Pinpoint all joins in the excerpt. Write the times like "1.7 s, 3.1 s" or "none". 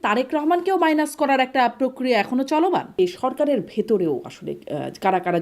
3.0 s